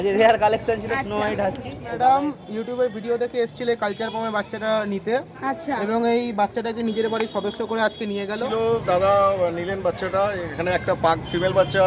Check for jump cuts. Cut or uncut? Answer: cut